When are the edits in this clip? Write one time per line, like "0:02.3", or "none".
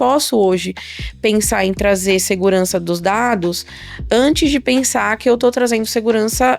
none